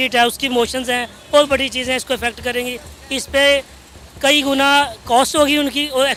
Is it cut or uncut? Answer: uncut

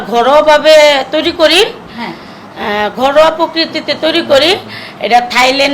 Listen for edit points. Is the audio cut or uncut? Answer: uncut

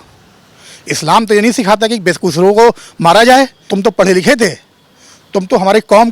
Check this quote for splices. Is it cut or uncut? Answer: cut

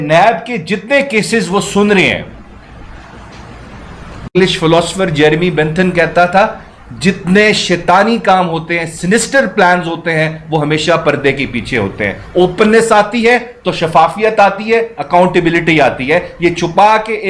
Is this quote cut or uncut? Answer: cut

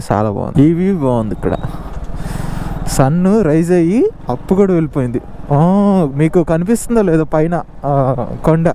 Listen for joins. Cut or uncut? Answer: uncut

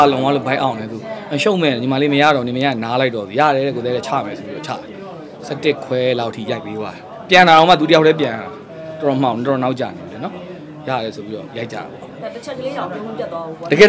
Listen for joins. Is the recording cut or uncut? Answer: uncut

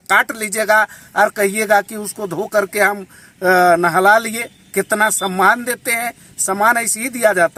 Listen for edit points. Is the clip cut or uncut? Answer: uncut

